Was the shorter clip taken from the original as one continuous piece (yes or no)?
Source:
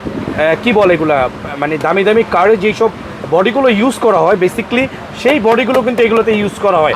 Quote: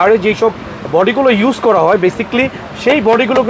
yes